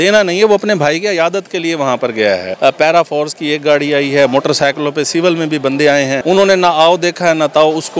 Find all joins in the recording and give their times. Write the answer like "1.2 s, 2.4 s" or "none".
2.5 s, 6.2 s